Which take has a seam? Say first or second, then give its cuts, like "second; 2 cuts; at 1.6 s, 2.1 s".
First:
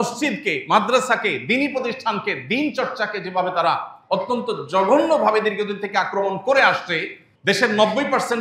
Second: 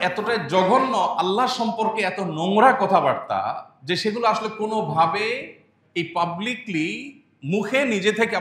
first; 1 cut; at 7.3 s